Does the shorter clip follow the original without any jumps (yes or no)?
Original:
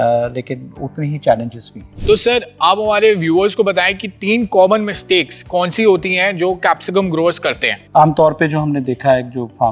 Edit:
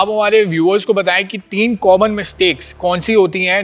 yes